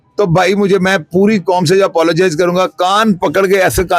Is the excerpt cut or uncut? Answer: uncut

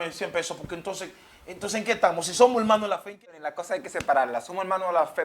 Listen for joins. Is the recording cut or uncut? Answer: cut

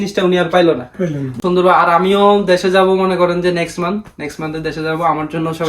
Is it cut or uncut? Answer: cut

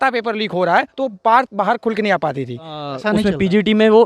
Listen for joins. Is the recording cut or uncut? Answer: cut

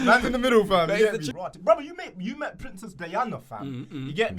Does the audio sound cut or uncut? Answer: cut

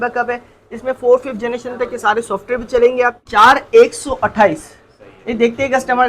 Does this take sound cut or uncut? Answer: cut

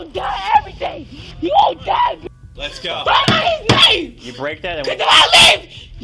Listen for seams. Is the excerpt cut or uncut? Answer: cut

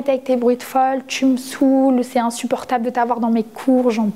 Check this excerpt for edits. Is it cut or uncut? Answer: uncut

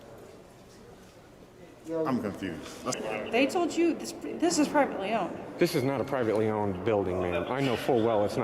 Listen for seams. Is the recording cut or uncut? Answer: cut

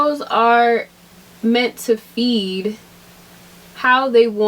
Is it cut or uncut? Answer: uncut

